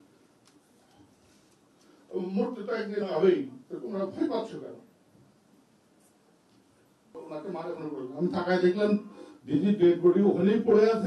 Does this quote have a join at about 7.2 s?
yes; 1 cut; at 7.2 s

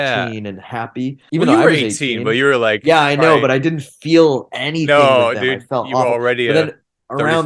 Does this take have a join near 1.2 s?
yes; 1 cut; at 1.2 s

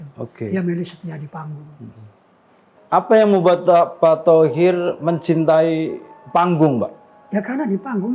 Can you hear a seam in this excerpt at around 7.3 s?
no; 1 cut; at 2.7 s

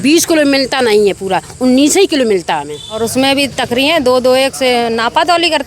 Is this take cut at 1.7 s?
no; 1 cut; at 3.0 s

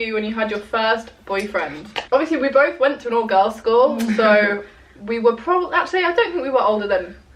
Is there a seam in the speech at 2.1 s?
no; 0 cuts

